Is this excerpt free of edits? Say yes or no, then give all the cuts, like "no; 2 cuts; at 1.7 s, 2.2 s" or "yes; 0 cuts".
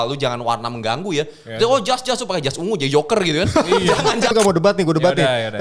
no; 1 cut; at 4.3 s